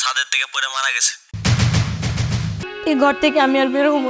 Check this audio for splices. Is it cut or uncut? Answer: cut